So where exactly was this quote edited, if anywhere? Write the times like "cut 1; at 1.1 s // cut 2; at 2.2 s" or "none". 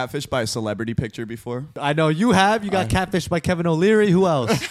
cut 1; at 1.7 s